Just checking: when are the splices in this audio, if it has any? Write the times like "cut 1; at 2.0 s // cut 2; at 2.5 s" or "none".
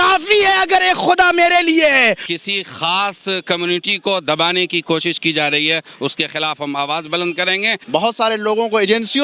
cut 1; at 2.3 s // cut 2; at 7.8 s